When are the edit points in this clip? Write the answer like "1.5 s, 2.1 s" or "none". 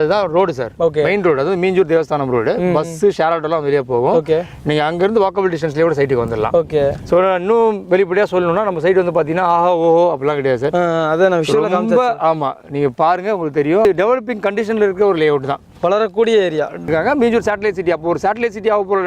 13.9 s, 16.9 s

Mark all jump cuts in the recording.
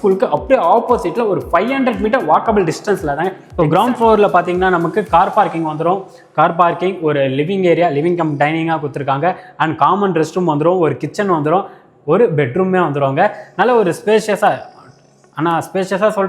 3.4 s

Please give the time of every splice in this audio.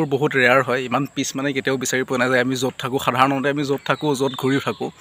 none

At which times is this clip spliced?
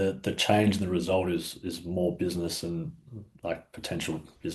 none

